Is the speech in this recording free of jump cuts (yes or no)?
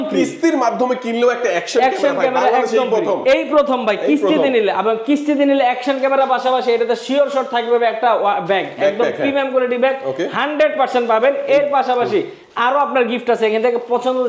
yes